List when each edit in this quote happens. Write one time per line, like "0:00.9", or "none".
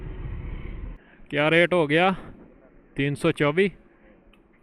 0:01.0